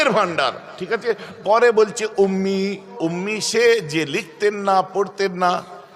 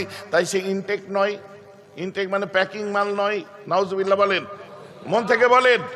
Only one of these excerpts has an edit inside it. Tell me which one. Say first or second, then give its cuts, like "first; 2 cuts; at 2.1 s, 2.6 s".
first; 1 cut; at 2.9 s